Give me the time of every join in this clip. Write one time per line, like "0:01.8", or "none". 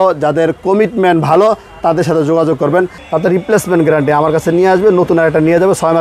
0:03.0

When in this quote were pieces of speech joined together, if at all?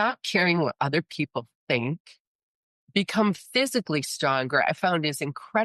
none

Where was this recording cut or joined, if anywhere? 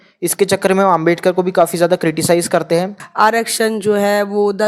0:03.0

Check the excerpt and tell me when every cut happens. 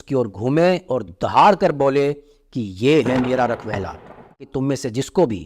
0:04.5

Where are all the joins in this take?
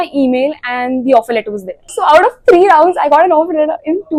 none

